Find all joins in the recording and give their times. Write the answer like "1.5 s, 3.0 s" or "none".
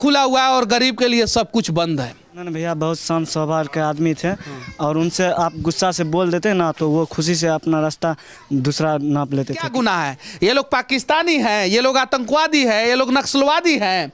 2.5 s, 9.7 s

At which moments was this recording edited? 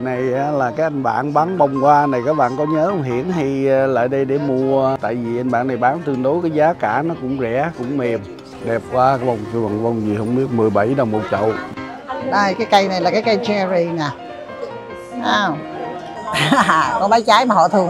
8.4 s, 11.7 s, 16.1 s

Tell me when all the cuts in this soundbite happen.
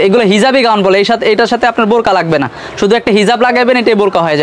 none

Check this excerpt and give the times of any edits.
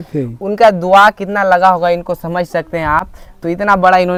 none

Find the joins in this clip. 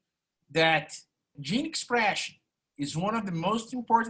1.4 s

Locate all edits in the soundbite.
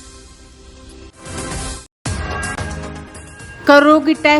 1.1 s

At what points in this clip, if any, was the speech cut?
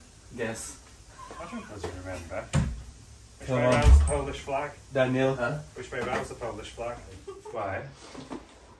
7.3 s

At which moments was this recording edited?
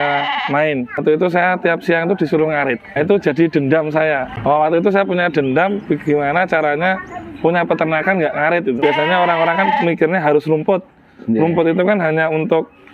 1.0 s, 3.0 s, 4.3 s, 8.8 s

